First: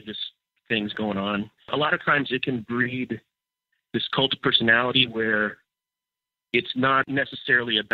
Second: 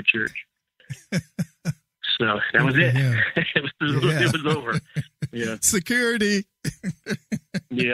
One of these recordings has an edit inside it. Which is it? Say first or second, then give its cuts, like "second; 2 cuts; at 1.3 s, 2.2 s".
first; 2 cuts; at 1.6 s, 7.0 s